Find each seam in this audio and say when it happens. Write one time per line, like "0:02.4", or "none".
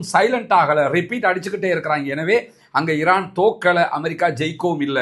none